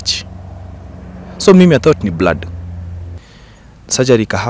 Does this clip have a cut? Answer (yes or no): yes